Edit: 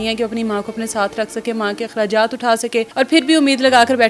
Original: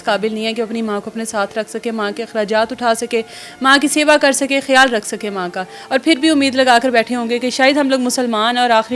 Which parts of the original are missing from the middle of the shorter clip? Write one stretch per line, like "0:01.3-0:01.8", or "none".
0:03.3-0:05.8